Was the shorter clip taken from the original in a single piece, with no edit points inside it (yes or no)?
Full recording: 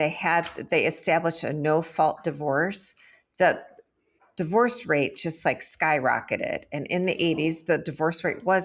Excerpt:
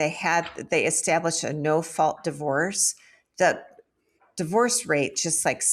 yes